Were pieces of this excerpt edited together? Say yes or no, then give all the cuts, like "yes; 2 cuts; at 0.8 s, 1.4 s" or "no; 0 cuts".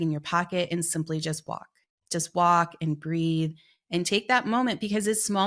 no; 0 cuts